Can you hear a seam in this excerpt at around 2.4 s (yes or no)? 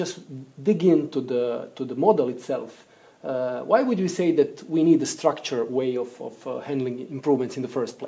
yes